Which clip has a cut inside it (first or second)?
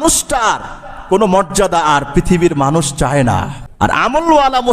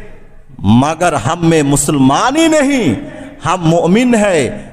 first